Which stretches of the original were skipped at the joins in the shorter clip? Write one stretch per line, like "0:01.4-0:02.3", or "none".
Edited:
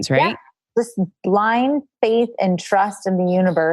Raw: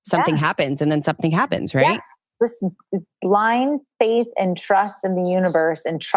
0:02.8-0:03.1